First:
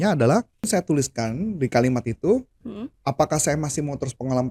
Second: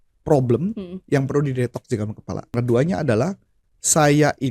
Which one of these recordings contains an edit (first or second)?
second